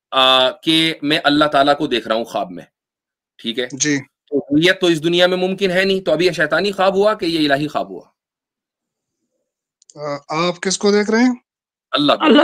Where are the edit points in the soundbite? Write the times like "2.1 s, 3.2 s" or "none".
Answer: none